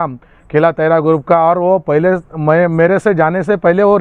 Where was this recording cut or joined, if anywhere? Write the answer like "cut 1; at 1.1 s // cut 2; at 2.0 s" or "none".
none